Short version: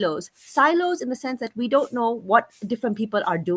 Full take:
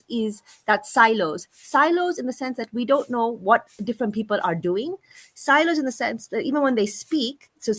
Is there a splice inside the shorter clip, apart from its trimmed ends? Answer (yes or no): no